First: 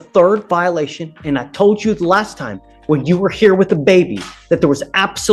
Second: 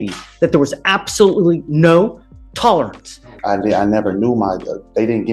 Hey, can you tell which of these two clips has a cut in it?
second; 1 cut; at 3.3 s

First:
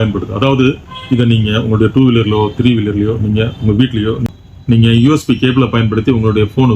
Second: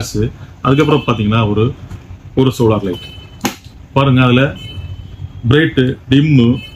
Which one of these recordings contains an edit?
first; 1 cut; at 4.2 s

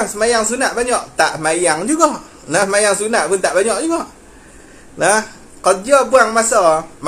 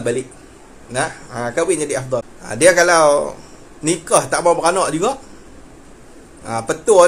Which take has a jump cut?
second; 1 cut; at 2.4 s

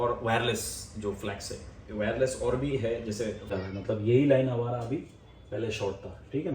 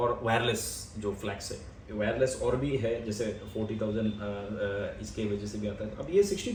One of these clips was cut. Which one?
first; 1 cut; at 3.5 s

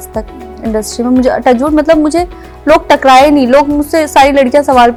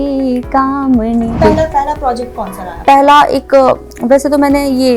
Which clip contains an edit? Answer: second; 1 cut; at 1.4 s

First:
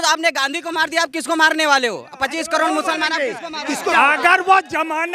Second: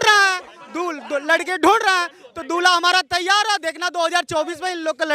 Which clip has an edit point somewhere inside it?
first; 1 cut; at 3.9 s

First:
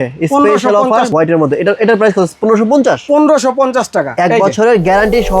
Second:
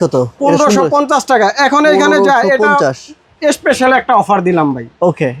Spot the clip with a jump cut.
first; 1 cut; at 1.1 s

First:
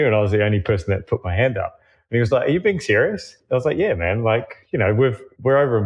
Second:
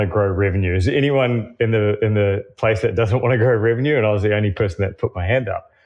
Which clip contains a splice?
first; 1 cut; at 3.4 s

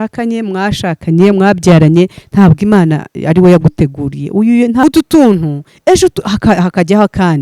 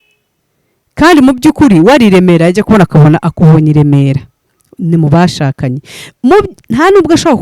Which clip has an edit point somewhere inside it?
first; 1 cut; at 4.8 s

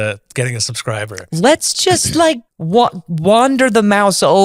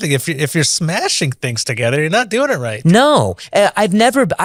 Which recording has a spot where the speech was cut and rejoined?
first; 1 cut; at 2.5 s

